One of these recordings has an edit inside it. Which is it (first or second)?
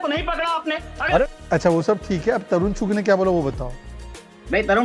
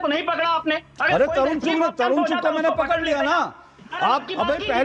first